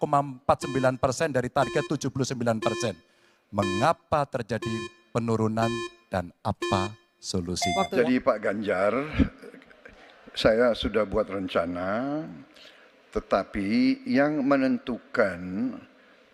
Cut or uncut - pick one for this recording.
uncut